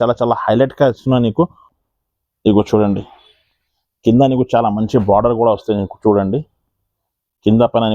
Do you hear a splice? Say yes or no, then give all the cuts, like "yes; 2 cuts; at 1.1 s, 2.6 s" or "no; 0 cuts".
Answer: yes; 1 cut; at 1.7 s